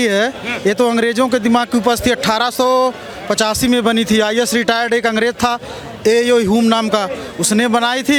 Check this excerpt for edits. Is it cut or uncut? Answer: uncut